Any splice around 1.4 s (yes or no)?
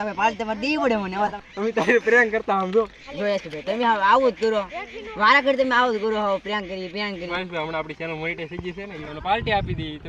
yes